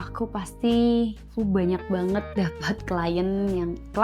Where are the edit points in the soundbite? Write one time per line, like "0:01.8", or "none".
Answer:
0:01.2